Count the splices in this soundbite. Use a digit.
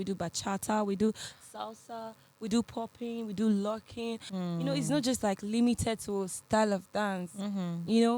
1